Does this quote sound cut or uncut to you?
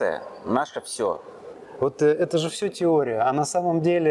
uncut